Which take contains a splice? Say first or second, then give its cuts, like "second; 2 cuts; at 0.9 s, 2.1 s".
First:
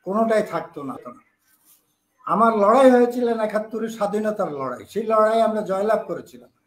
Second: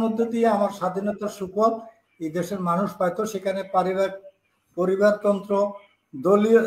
first; 1 cut; at 1.0 s